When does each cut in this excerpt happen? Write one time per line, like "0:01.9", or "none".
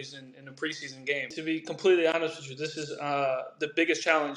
0:01.3